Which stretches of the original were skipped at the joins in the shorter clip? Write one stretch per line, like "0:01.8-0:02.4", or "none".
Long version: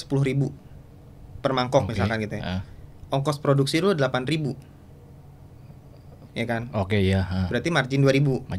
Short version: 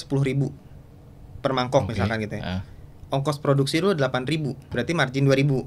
0:04.7-0:07.5